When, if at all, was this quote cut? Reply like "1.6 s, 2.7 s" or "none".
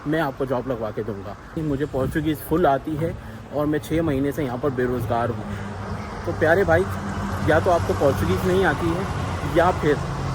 1.6 s